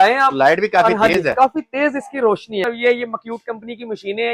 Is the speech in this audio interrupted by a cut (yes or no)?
yes